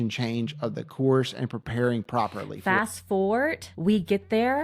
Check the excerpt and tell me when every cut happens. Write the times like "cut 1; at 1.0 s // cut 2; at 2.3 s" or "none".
cut 1; at 2.5 s // cut 2; at 3.7 s